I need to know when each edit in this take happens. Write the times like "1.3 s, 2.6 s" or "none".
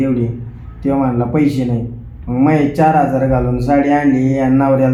none